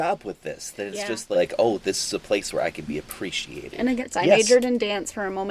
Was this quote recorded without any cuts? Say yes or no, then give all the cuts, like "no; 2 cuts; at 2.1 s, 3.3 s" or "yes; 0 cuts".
no; 2 cuts; at 1.3 s, 4.0 s